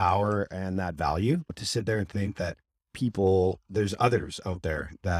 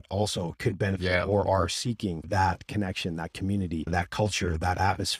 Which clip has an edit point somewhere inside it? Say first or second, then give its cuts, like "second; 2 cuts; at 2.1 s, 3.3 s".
first; 1 cut; at 1.5 s